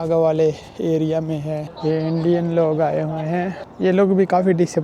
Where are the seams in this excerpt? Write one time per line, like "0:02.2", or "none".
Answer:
0:01.7
0:03.6